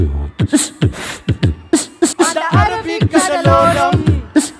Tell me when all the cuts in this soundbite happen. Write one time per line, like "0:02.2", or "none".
0:02.1